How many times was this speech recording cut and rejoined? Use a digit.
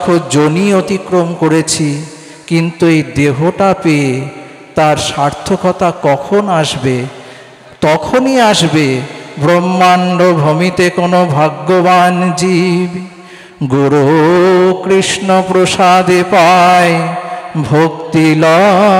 0